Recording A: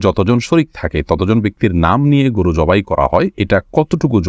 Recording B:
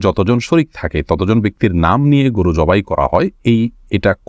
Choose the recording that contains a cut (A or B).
A